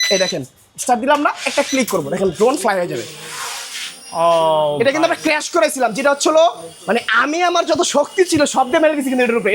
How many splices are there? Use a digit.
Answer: 0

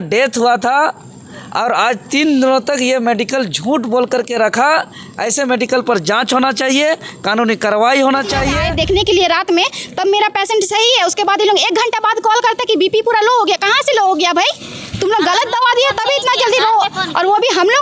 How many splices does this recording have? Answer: 1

